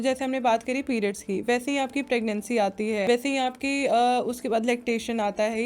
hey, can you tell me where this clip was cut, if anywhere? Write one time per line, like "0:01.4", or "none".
0:03.1